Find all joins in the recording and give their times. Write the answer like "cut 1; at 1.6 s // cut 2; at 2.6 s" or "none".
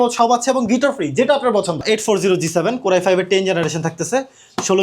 cut 1; at 1.8 s